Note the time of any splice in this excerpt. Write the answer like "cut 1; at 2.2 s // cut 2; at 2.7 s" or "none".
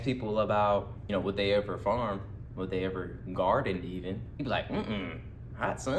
cut 1; at 1.0 s // cut 2; at 4.3 s